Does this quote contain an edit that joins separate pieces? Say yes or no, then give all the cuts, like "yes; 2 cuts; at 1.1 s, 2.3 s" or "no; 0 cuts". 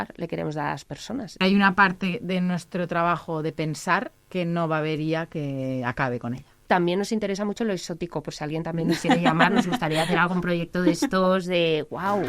yes; 3 cuts; at 1.4 s, 4.2 s, 6.5 s